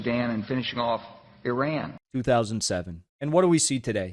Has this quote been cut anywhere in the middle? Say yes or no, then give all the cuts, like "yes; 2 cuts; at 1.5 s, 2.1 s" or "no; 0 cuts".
yes; 1 cut; at 2.0 s